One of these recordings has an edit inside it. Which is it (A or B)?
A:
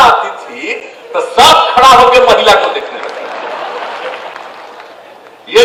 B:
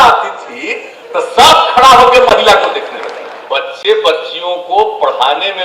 B